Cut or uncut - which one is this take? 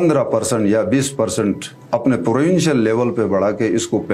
uncut